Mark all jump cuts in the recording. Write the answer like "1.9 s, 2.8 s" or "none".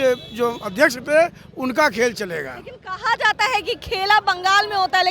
none